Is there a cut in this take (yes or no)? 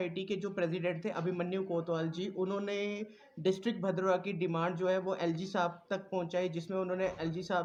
no